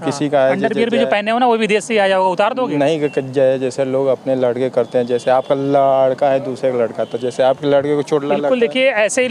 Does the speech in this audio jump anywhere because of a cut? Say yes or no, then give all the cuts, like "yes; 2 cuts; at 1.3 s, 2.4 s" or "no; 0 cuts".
no; 0 cuts